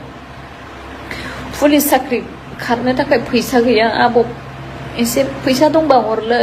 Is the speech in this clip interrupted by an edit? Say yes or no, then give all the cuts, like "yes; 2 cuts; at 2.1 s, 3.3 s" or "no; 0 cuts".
no; 0 cuts